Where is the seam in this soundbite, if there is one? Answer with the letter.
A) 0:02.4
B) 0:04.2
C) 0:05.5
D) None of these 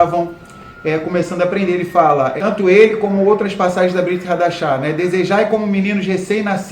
A